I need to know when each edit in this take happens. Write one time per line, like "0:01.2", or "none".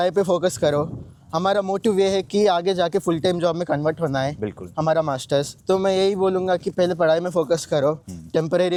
none